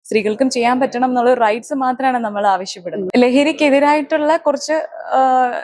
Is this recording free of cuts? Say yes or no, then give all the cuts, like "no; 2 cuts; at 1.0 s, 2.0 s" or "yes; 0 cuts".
no; 1 cut; at 3.1 s